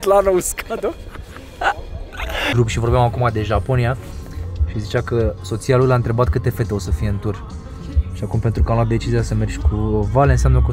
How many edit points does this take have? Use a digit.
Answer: 1